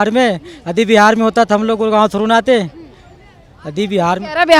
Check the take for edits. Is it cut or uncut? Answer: uncut